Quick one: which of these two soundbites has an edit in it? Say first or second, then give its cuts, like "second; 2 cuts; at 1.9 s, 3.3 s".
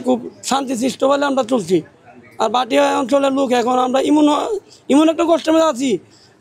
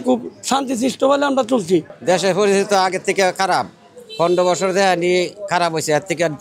second; 1 cut; at 1.9 s